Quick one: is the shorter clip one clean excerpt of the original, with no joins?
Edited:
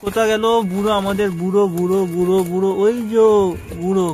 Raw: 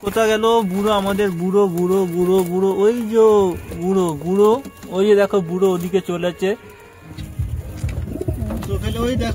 yes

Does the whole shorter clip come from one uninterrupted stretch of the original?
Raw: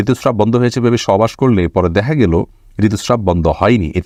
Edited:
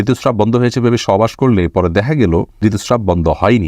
no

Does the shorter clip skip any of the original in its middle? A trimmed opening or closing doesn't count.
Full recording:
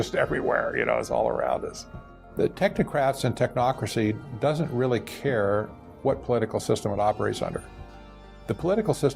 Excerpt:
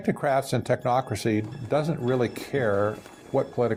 no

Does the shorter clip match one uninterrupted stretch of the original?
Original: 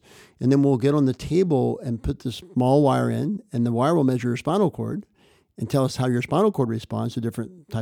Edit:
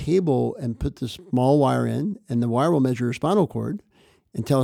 yes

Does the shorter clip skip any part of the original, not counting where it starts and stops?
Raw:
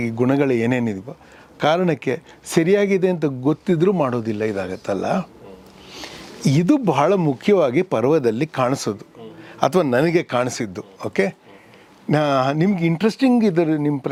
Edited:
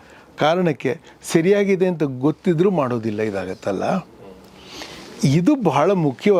no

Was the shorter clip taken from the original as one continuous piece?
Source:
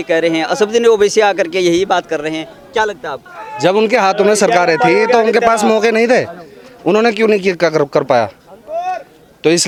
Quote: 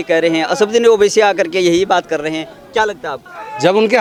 yes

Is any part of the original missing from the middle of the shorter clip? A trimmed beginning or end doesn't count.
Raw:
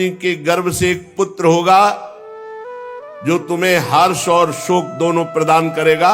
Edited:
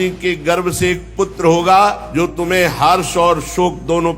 yes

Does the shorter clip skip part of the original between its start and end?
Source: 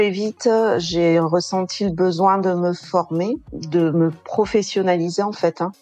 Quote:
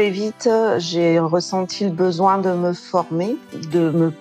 no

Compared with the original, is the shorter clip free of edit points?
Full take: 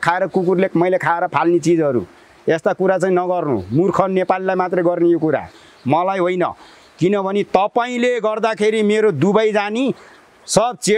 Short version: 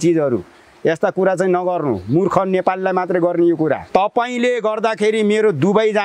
no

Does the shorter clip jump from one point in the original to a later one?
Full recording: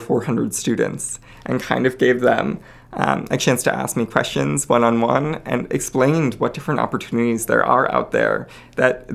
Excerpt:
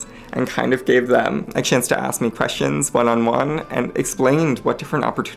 yes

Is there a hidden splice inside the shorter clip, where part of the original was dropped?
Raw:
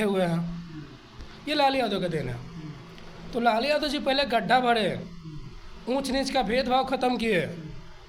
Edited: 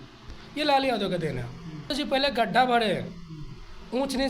yes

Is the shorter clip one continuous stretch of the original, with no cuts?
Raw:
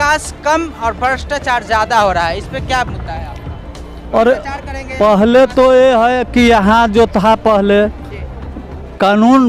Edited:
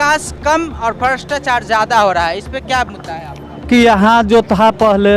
no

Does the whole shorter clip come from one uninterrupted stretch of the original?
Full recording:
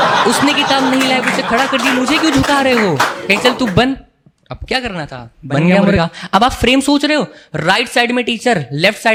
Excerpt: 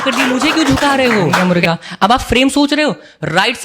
no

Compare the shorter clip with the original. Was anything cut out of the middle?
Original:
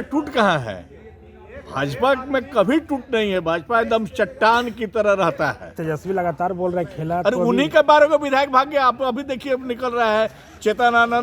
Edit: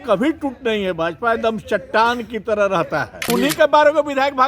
yes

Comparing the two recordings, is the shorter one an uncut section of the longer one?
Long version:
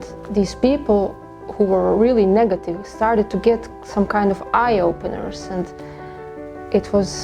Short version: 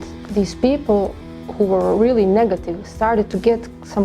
yes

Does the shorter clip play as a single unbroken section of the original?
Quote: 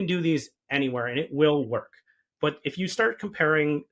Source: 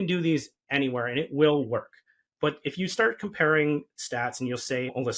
yes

